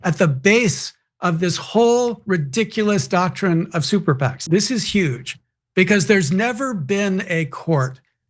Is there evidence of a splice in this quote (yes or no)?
yes